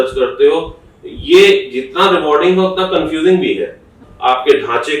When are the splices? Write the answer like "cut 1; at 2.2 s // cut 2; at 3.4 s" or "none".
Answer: cut 1; at 4.1 s